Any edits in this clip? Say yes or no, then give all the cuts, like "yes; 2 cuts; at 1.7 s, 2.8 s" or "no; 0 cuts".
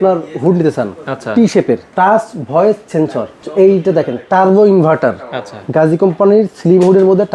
yes; 2 cuts; at 1.9 s, 3.4 s